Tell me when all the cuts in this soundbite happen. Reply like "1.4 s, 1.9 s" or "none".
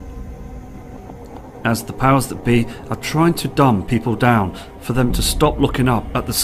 none